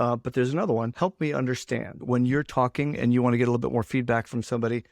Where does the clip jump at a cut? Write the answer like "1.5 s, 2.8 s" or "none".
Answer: 0.9 s, 2.0 s